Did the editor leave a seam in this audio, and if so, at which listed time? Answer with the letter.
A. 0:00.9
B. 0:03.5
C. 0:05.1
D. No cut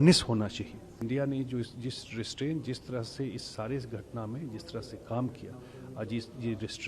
A